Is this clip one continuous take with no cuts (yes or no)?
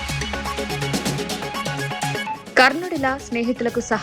no